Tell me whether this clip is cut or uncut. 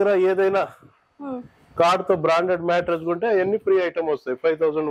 uncut